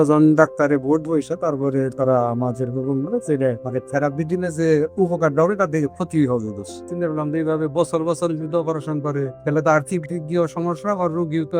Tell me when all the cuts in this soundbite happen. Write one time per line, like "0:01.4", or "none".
0:03.6
0:06.9
0:09.3